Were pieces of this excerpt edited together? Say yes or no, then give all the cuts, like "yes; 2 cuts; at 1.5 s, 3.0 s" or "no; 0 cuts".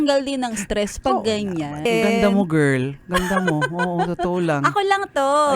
yes; 1 cut; at 1.9 s